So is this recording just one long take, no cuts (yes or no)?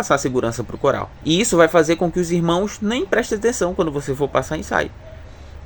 no